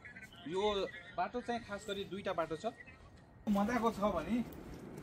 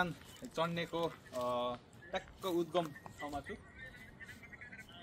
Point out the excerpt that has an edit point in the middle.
first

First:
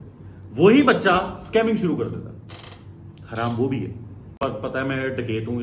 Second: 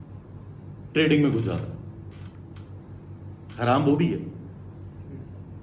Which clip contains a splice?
first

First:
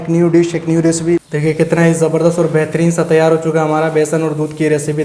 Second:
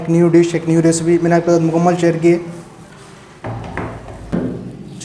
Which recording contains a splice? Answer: first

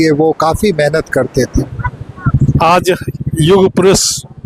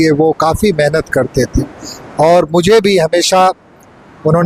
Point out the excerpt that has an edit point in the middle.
first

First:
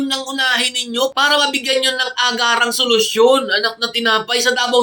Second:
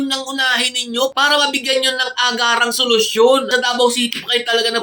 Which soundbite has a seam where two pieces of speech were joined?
second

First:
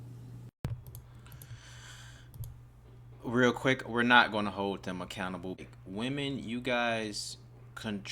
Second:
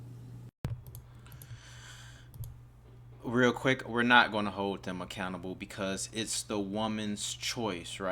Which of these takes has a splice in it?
first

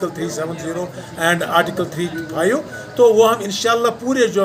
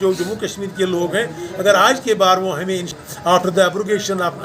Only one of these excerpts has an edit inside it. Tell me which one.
second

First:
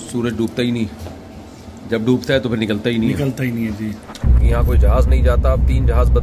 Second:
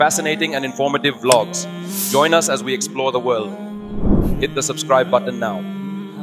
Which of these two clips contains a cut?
first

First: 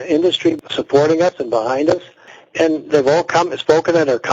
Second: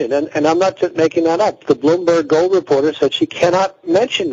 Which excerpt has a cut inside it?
first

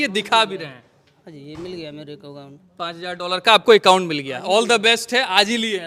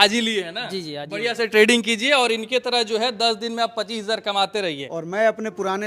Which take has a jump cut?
second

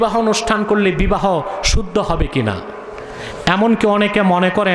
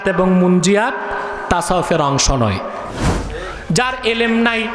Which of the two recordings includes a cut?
second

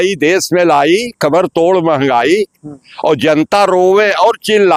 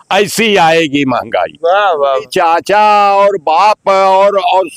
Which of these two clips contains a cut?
second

